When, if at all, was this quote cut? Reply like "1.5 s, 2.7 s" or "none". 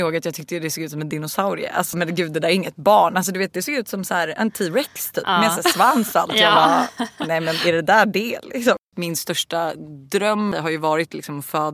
2.0 s, 8.8 s, 10.5 s

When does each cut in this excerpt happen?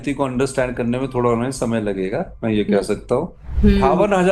3.4 s

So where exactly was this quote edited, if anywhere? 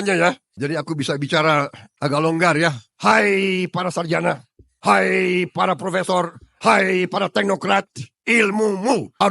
1.8 s, 2.9 s

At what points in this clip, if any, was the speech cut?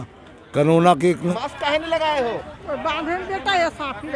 1.3 s

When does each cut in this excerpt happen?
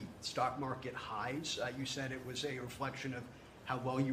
none

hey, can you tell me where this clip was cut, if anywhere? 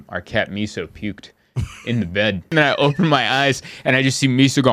2.5 s

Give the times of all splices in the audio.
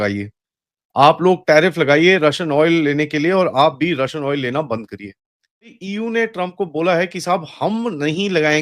5.8 s

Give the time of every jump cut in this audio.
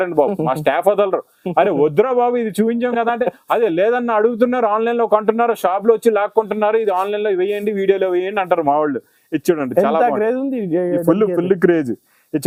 none

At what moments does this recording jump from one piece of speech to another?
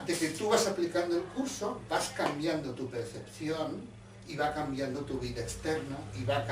1.3 s

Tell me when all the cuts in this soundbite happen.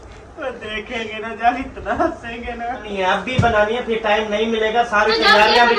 2.9 s

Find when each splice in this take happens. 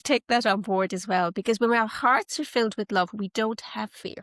none

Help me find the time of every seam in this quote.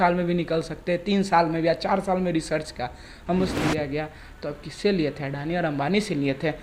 3.6 s

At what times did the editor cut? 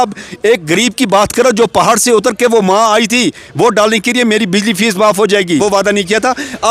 5.6 s

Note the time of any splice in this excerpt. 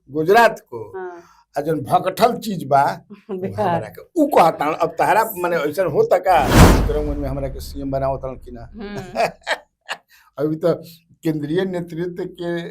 6.7 s

